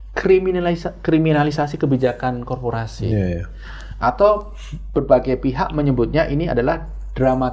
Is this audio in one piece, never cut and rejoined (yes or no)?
yes